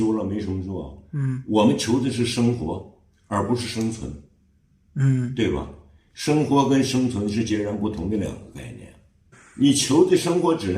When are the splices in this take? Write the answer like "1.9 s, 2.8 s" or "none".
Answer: 9.3 s